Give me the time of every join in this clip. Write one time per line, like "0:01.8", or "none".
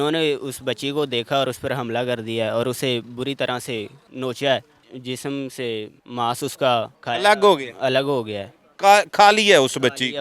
0:04.0
0:04.9
0:06.0
0:07.0